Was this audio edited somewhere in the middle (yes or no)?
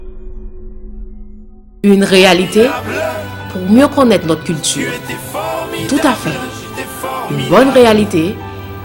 no